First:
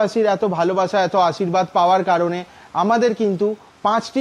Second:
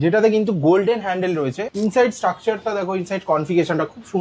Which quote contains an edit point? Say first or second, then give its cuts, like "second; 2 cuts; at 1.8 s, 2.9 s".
second; 1 cut; at 1.6 s